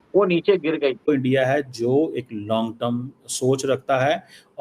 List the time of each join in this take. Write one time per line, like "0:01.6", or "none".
0:01.1